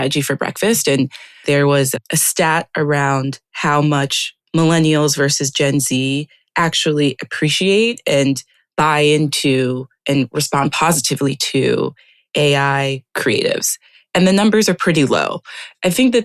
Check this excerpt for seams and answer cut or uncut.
cut